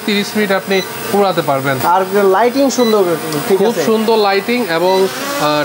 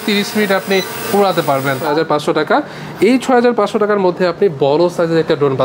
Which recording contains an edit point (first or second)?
second